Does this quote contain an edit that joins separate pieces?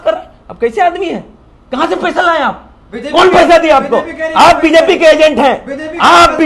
no; 0 cuts

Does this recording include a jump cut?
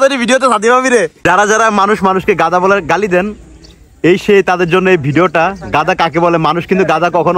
yes; 1 cut; at 1.2 s

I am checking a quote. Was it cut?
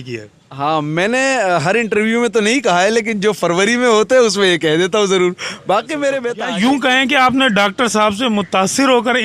yes; 1 cut; at 6.3 s

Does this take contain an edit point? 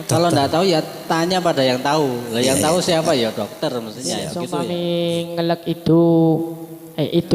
yes; 1 cut; at 4.7 s

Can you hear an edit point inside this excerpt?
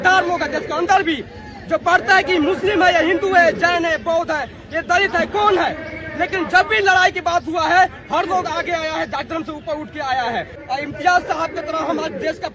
yes; 1 cut; at 10.6 s

